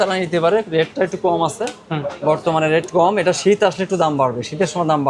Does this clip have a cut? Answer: no; 0 cuts

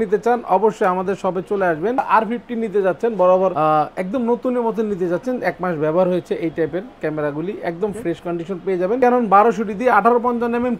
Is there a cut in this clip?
yes; 2 cuts; at 2.0 s, 9.0 s

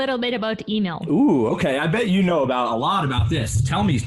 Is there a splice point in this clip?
yes; 1 cut; at 1.1 s

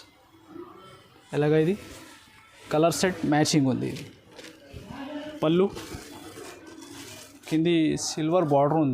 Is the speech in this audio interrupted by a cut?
yes; 1 cut; at 5.4 s

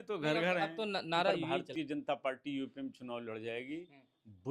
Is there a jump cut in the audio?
yes; 1 cut; at 1.6 s

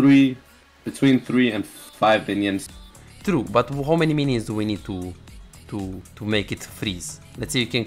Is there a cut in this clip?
yes; 1 cut; at 2.8 s

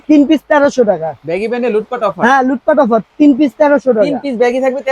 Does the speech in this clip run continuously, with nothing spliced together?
yes; 0 cuts

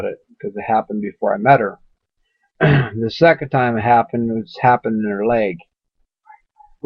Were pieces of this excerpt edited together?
yes; 1 cut; at 2.0 s

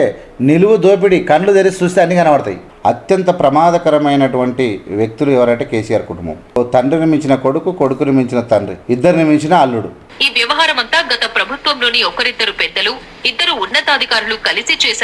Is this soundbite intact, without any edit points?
no; 4 cuts; at 2.6 s, 6.6 s, 8.8 s, 10.0 s

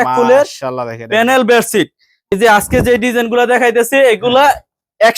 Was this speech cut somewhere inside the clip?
yes; 1 cut; at 2.3 s

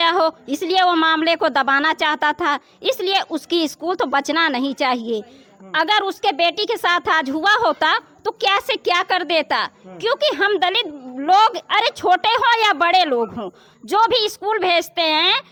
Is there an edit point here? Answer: no; 0 cuts

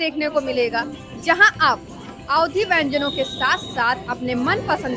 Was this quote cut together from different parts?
no; 0 cuts

